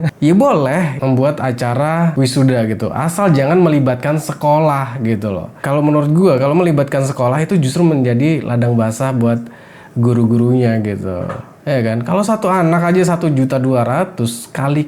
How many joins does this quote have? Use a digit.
2